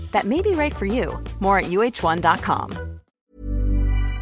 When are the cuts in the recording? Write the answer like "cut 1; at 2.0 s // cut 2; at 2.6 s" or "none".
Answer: cut 1; at 3.2 s